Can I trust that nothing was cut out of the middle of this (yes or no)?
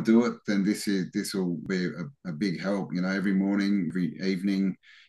no